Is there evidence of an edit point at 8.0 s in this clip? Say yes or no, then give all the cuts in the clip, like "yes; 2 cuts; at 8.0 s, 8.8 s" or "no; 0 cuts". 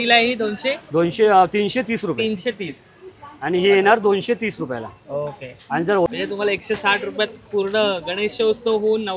no; 1 cut; at 6.1 s